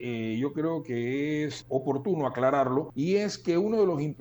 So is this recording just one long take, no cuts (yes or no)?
no